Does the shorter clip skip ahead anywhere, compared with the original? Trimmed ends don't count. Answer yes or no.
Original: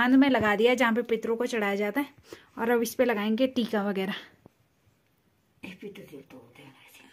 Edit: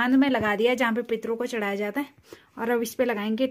no